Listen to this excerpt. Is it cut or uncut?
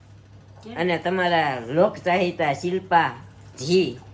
uncut